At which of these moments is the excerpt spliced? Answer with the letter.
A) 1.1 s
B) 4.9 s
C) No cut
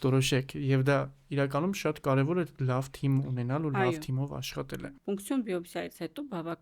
B